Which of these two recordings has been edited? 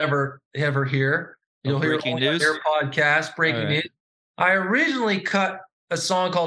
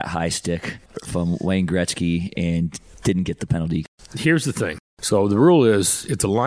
second; 4 cuts; at 0.9 s, 2.9 s, 3.8 s, 4.9 s

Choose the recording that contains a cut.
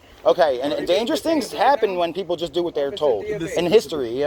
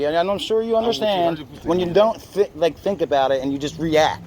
second; 1 cut; at 1.5 s

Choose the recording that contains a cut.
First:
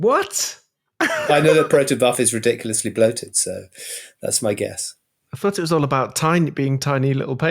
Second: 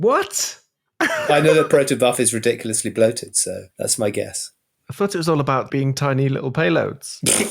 second; 2 cuts; at 3.7 s, 5.7 s

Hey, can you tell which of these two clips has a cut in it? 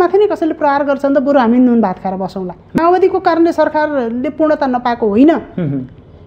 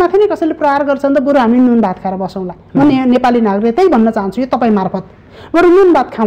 first; 1 cut; at 2.8 s

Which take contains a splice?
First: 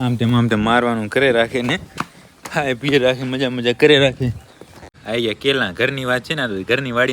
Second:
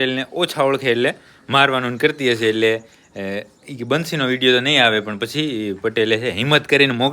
first; 1 cut; at 5.0 s

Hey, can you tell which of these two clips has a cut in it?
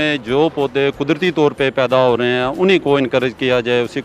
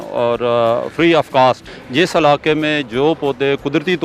second; 1 cut; at 1.7 s

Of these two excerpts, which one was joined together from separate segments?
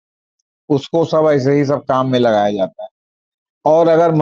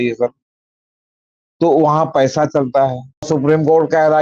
second; 1 cut; at 3.3 s

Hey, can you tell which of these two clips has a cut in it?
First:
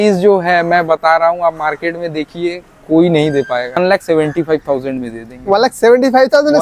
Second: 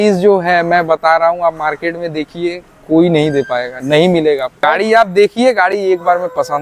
first; 1 cut; at 3.8 s

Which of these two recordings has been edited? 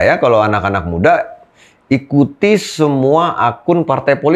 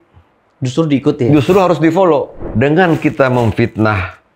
second; 1 cut; at 2.4 s

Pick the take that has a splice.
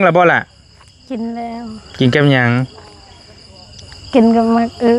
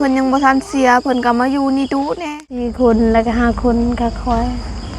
second; 1 cut; at 2.7 s

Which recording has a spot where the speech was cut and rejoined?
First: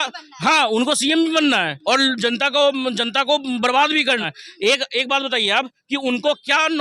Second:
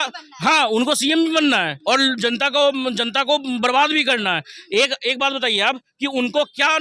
first; 1 cut; at 4.2 s

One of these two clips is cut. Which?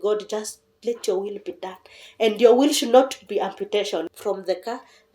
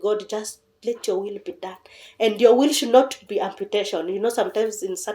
first; 1 cut; at 4.1 s

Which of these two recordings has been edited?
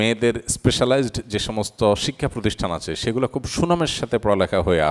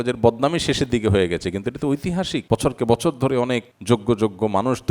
second; 2 cuts; at 2.4 s, 3.7 s

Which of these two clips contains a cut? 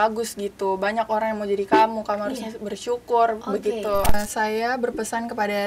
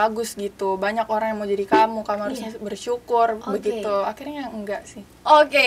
first; 1 cut; at 4.2 s

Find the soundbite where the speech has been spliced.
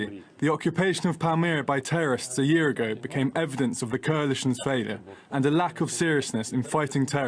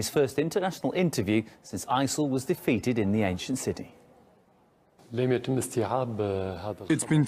first; 1 cut; at 6.3 s

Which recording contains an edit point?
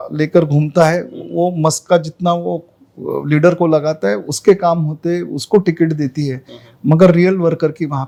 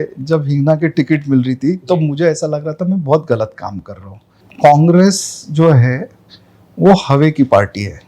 second; 1 cut; at 4.4 s

